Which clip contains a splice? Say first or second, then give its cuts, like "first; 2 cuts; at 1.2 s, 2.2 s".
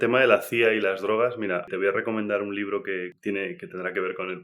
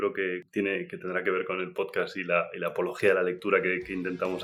first; 1 cut; at 1.7 s